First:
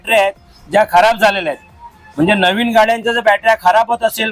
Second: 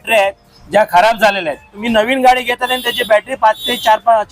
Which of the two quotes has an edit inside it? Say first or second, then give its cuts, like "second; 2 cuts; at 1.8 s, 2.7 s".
second; 1 cut; at 1.8 s